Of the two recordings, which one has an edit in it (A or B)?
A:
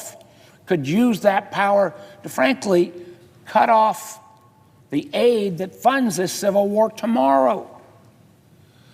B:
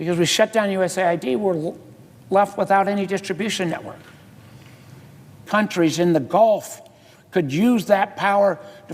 B